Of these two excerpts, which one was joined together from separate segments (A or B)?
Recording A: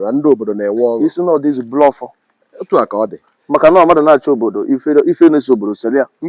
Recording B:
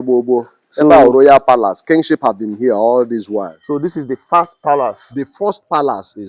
B